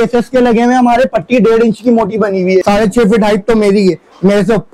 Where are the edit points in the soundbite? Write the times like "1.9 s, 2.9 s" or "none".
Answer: 2.6 s